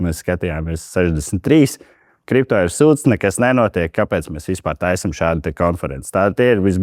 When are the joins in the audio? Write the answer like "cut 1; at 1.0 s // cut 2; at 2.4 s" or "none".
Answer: none